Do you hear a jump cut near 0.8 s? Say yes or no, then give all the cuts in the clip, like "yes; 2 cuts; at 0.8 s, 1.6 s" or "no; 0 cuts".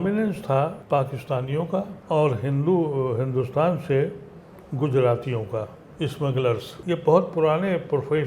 yes; 3 cuts; at 0.8 s, 2.0 s, 6.7 s